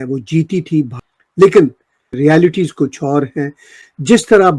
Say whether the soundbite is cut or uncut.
cut